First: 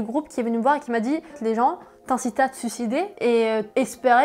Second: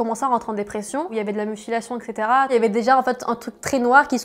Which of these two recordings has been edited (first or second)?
second